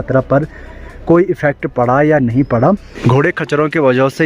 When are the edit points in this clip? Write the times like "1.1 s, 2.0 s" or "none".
2.9 s